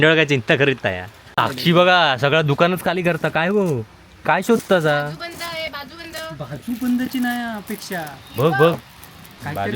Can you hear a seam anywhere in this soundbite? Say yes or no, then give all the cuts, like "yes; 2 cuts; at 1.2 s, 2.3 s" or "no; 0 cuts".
yes; 1 cut; at 1.4 s